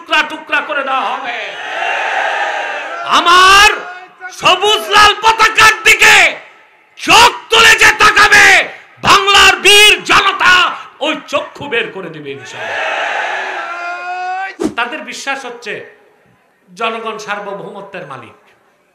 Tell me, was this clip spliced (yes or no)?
yes